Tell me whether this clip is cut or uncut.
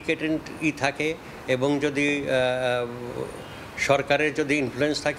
uncut